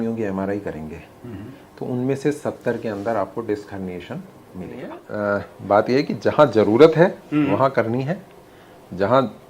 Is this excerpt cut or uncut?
cut